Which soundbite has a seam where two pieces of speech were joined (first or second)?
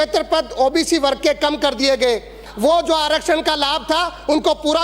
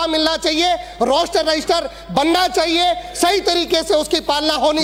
first